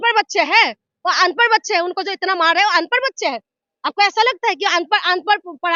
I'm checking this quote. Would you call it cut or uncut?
uncut